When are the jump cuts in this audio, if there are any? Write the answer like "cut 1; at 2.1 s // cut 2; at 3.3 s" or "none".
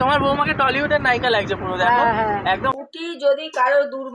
cut 1; at 2.7 s